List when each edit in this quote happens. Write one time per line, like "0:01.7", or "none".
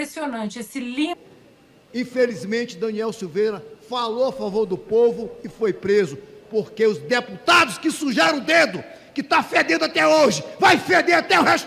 0:01.1